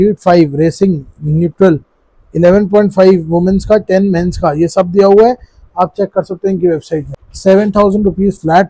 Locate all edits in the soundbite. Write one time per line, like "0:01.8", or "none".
0:07.2